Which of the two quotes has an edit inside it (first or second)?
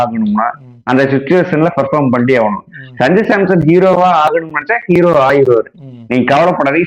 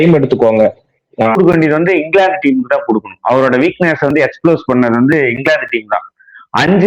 second